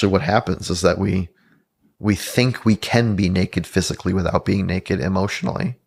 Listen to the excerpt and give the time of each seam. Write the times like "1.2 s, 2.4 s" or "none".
none